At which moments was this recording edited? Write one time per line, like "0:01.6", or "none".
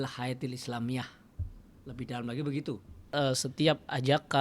0:03.1